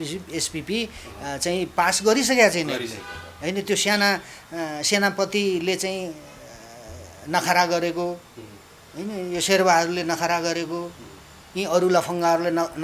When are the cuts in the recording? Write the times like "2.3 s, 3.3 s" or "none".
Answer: none